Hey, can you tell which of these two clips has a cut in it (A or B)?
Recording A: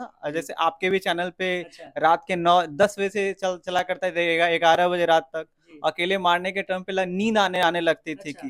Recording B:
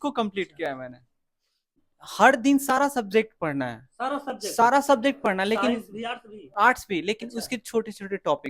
B